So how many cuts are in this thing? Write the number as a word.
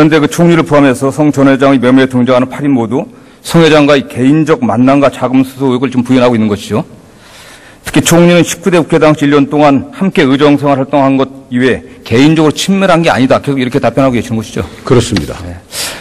one